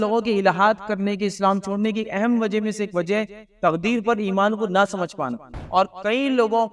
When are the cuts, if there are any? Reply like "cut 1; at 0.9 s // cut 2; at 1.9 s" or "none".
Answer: cut 1; at 5.5 s